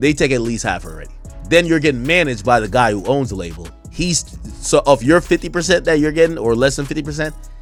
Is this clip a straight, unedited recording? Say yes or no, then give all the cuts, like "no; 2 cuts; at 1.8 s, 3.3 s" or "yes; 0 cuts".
yes; 0 cuts